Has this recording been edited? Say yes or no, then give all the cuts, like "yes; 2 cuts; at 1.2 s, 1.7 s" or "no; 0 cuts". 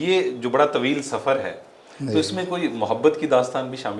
no; 0 cuts